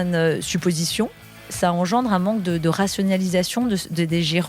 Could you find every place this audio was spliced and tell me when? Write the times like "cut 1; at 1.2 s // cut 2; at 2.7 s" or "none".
cut 1; at 1.5 s